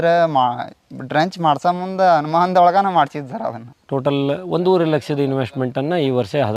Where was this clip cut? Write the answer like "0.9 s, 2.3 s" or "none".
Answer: 3.6 s